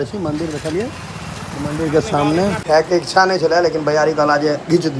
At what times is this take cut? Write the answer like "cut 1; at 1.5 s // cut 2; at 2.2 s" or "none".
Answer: cut 1; at 2.6 s